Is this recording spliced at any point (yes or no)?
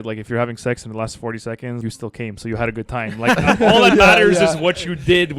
yes